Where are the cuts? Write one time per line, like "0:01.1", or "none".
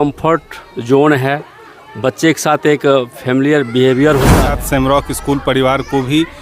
0:04.5